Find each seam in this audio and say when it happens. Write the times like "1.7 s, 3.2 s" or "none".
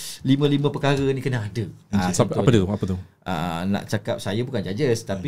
none